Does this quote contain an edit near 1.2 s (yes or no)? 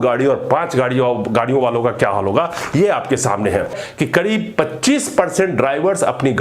no